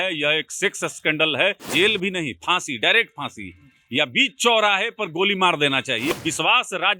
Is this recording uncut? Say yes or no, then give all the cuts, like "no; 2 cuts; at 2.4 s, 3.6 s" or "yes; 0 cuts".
no; 2 cuts; at 1.6 s, 6.1 s